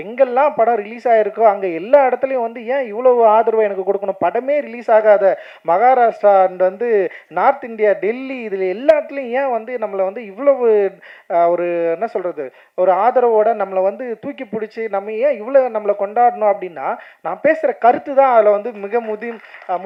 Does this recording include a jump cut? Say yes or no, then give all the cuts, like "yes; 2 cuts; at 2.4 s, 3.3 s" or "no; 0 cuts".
no; 0 cuts